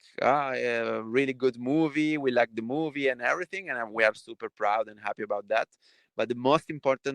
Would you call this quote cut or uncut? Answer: uncut